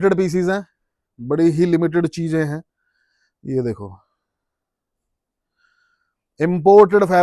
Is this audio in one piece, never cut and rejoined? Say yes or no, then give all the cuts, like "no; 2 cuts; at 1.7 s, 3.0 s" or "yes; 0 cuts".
yes; 0 cuts